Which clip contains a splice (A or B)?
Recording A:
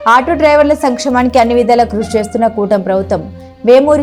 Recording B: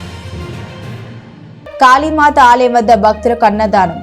B